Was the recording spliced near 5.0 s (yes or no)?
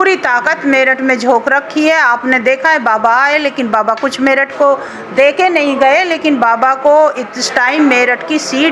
no